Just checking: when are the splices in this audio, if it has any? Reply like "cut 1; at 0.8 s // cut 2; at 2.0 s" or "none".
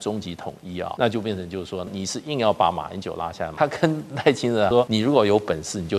cut 1; at 0.9 s // cut 2; at 1.9 s // cut 3; at 3.5 s // cut 4; at 4.8 s